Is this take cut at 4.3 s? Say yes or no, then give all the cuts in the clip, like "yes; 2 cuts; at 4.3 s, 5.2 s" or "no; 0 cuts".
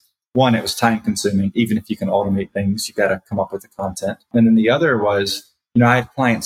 yes; 1 cut; at 4.3 s